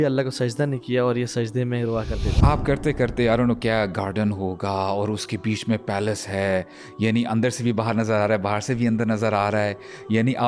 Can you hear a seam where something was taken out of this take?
yes; 1 cut; at 2.3 s

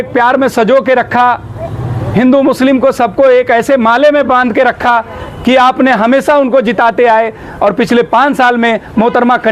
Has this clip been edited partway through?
no; 0 cuts

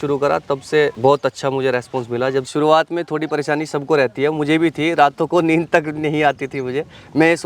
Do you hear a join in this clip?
yes; 2 cuts; at 0.9 s, 2.5 s

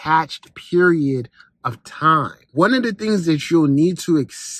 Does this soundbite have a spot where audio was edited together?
yes; 1 cut; at 2.5 s

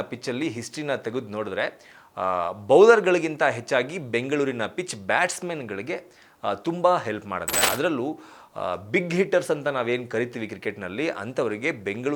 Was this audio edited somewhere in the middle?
no; 0 cuts

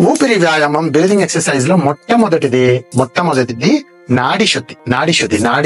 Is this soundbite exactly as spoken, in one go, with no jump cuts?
no; 2 cuts; at 2.9 s, 4.7 s

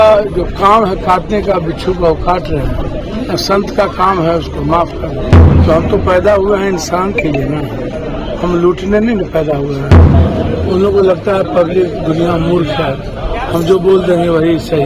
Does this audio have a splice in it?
yes; 4 cuts; at 3.0 s, 5.5 s, 7.9 s, 10.1 s

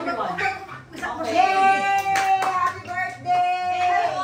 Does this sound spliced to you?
no; 0 cuts

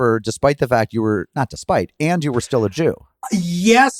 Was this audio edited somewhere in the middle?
yes; 1 cut; at 3.1 s

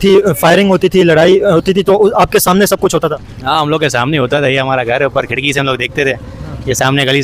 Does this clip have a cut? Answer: no; 0 cuts

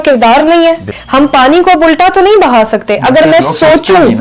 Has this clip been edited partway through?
yes; 1 cut; at 0.9 s

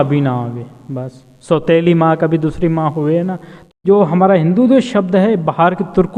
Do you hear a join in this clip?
yes; 1 cut; at 3.7 s

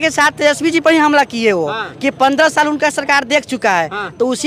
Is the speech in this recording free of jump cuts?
yes; 0 cuts

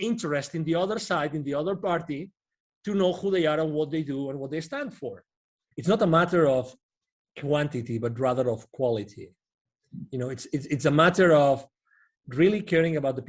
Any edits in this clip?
yes; 1 cut; at 5.6 s

